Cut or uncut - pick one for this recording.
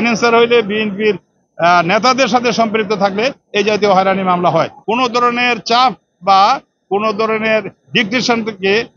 cut